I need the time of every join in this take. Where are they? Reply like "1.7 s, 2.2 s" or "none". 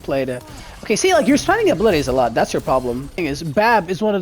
3.2 s